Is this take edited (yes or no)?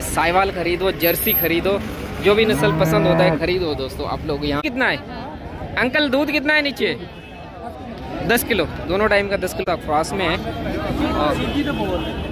yes